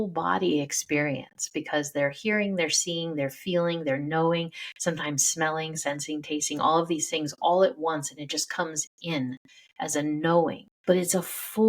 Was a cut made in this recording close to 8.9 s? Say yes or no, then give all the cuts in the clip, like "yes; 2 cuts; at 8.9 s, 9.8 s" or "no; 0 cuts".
no; 1 cut; at 10.7 s